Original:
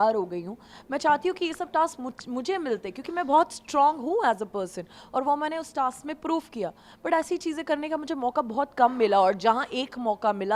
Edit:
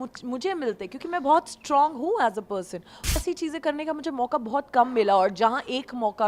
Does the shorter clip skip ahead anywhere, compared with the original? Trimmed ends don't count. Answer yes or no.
yes